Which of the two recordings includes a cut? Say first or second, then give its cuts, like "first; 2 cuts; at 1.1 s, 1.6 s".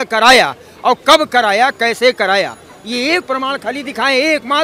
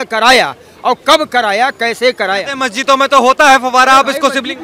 second; 1 cut; at 2.5 s